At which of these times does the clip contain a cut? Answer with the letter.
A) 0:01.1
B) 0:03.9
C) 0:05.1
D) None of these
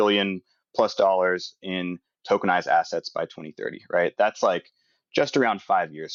D